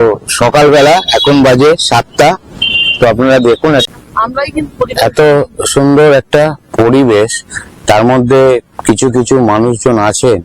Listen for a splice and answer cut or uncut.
cut